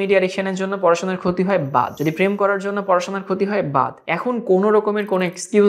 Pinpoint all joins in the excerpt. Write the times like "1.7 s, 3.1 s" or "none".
1.9 s, 4.0 s